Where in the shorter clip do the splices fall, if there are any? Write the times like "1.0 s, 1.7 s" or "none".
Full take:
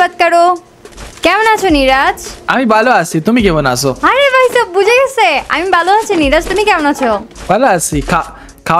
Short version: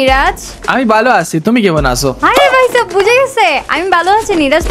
none